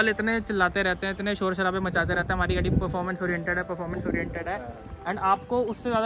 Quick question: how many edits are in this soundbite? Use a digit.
0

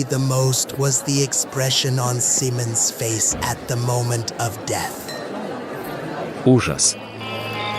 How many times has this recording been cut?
1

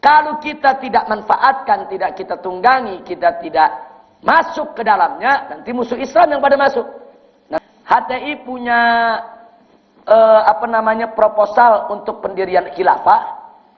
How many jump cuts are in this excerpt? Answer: 1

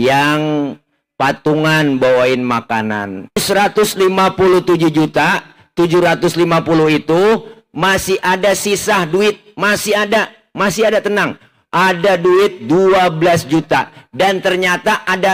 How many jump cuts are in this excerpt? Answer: 1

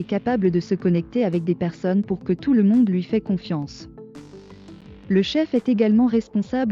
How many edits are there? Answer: 0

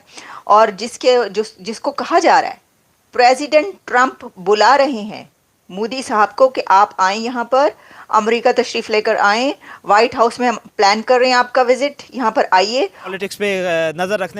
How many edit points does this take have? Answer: 1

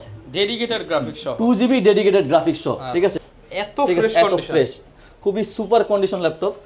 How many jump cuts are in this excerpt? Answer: 1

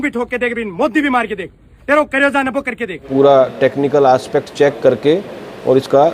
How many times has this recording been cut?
1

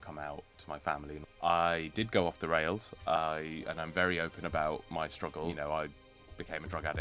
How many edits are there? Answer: 2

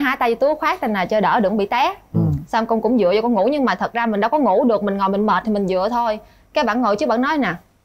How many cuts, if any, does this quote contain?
0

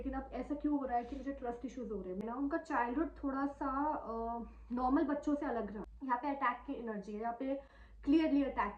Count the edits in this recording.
2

